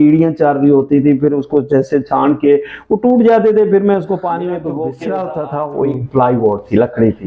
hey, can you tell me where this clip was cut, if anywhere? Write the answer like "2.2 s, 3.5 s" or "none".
5.0 s